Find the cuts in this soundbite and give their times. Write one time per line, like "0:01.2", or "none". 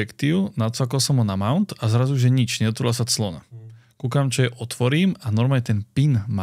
none